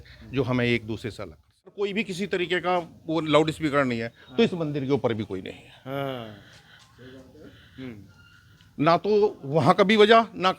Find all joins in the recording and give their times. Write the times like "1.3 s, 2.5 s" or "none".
1.8 s